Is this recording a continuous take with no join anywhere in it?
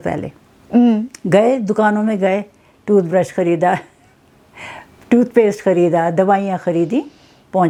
yes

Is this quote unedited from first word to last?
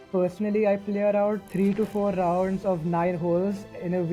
yes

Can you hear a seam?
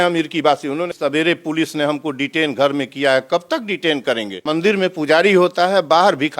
yes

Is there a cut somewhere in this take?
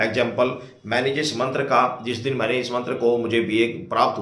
no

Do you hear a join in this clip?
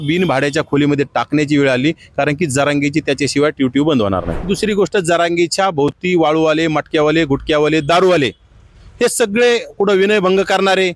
yes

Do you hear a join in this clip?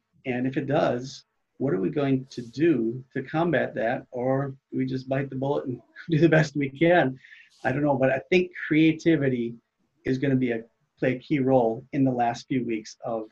no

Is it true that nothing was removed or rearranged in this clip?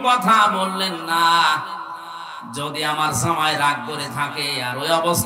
yes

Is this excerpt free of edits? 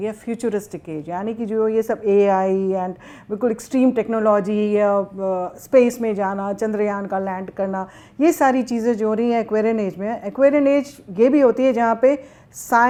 yes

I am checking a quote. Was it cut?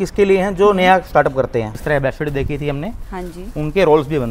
yes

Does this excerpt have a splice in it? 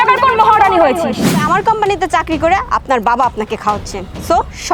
yes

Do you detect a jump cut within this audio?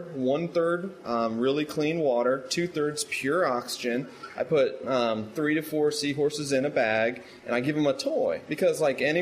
no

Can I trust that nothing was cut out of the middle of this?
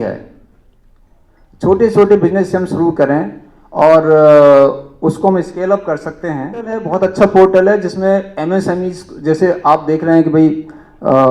no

